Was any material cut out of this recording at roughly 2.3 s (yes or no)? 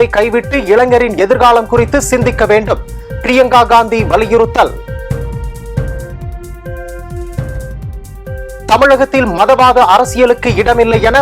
no